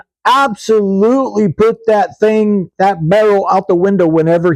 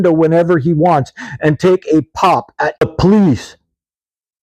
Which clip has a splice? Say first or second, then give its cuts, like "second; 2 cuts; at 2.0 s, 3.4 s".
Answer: second; 1 cut; at 2.8 s